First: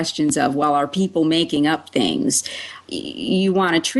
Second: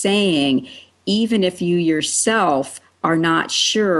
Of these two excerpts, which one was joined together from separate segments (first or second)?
first